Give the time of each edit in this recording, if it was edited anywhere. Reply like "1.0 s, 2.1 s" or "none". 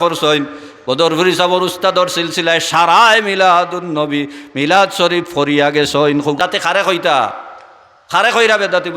6.4 s